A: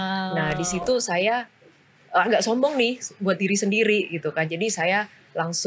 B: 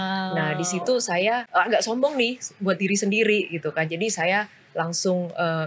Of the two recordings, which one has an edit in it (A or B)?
B